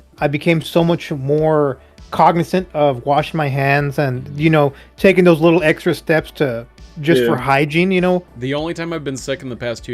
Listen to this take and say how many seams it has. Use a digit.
1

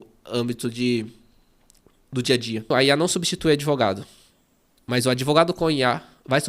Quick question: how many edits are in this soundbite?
1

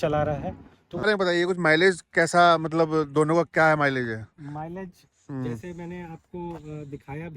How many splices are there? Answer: 1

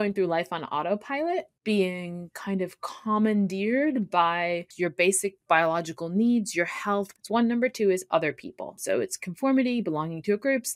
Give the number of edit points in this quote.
4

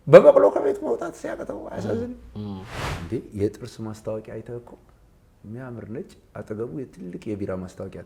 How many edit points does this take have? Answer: 1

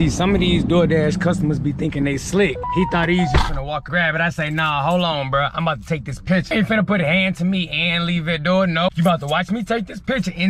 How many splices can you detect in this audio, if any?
4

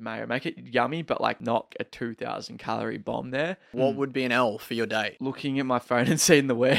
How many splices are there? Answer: 3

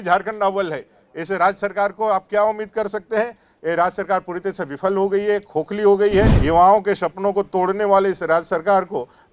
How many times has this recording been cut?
1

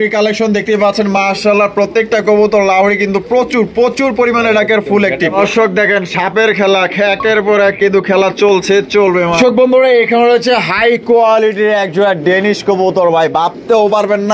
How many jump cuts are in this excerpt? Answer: 2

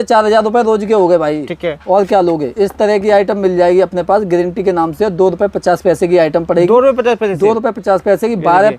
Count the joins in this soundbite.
0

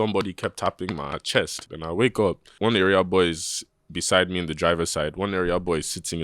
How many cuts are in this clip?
2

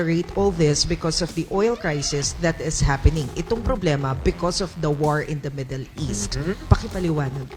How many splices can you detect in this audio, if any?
0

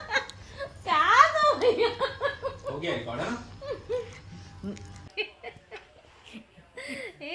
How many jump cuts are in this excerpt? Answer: 1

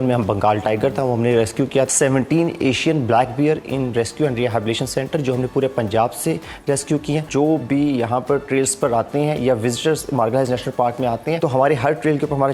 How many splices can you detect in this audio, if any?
3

